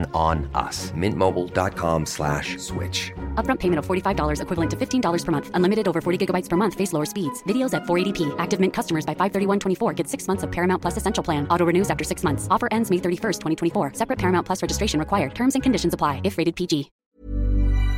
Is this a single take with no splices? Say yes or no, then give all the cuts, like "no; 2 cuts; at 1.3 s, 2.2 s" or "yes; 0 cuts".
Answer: no; 1 cut; at 16.9 s